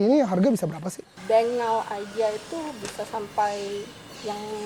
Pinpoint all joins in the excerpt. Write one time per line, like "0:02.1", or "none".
0:01.1